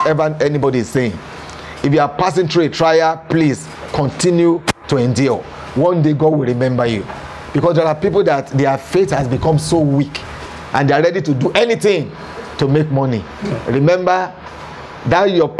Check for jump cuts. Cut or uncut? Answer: uncut